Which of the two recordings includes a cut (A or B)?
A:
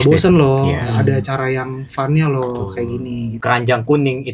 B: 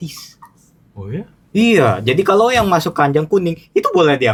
A